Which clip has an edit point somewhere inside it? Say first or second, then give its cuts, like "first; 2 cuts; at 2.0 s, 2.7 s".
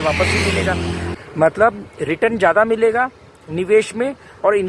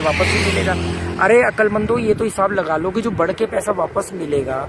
first; 1 cut; at 1.1 s